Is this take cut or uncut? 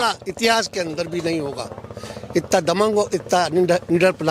uncut